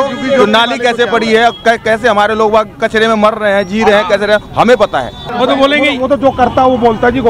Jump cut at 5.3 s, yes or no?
yes